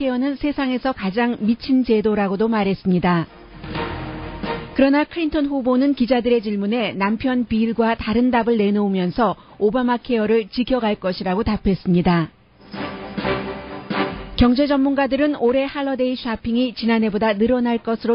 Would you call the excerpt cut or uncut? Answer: cut